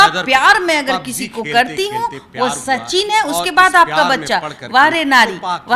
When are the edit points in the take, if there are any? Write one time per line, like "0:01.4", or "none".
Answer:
none